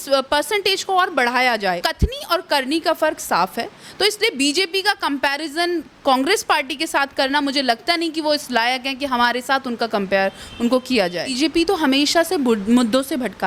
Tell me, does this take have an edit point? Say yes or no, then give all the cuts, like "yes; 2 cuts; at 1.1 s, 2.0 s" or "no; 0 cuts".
yes; 2 cuts; at 1.8 s, 11.3 s